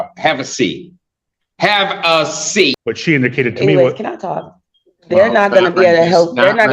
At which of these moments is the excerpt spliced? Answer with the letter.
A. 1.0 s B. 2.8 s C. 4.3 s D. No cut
B